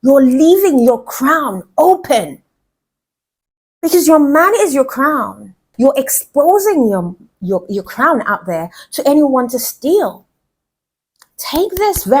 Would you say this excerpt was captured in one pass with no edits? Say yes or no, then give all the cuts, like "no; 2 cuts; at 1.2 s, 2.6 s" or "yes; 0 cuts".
no; 1 cut; at 5.6 s